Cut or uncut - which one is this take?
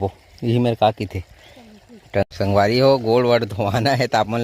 cut